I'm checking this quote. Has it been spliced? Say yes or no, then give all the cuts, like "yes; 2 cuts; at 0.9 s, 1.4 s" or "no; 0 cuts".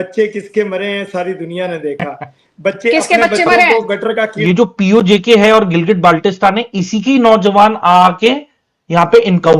yes; 1 cut; at 4.4 s